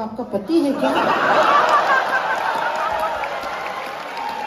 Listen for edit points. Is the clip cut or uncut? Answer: uncut